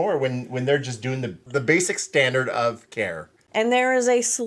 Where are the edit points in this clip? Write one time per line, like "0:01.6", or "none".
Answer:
0:01.4
0:03.4